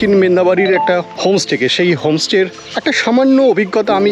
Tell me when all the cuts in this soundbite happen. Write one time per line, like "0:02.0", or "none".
0:01.1
0:02.6

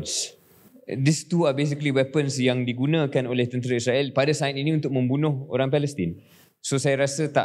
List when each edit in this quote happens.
none

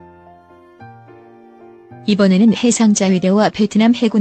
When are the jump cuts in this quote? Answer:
0:02.1

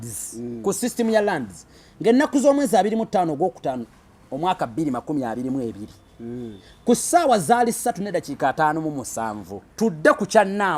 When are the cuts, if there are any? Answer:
0:09.6

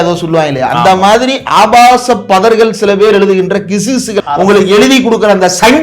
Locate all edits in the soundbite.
0:04.2

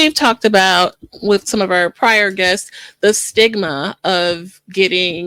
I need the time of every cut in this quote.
none

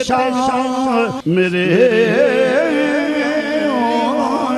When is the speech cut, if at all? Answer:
0:01.2

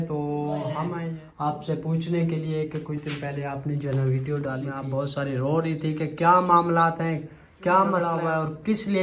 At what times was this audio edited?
0:01.0
0:04.7
0:08.1

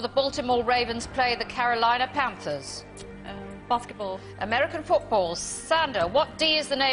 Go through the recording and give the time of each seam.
0:02.4

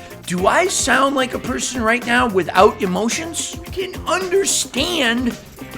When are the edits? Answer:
0:03.7

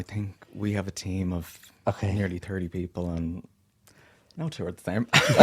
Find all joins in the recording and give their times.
none

